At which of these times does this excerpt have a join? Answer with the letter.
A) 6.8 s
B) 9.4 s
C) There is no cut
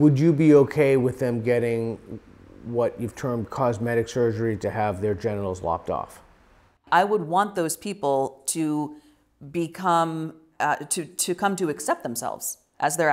A